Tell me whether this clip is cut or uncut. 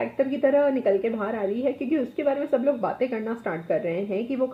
uncut